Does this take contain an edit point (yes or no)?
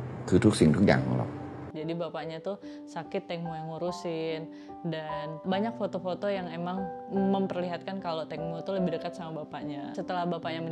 no